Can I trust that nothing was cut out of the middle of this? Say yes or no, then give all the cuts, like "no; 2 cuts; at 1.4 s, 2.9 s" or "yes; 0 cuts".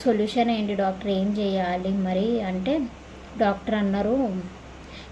yes; 0 cuts